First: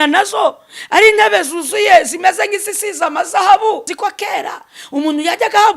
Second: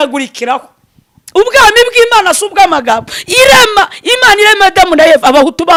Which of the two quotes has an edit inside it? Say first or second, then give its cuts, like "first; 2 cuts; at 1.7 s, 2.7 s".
first; 1 cut; at 3.9 s